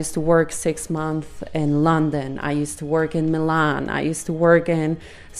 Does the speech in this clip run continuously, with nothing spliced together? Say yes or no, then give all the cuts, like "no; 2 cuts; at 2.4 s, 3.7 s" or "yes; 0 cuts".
yes; 0 cuts